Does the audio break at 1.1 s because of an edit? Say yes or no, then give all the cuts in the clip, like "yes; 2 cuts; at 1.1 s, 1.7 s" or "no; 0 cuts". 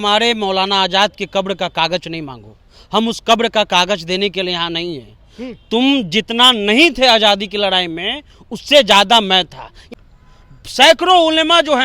no; 1 cut; at 9.9 s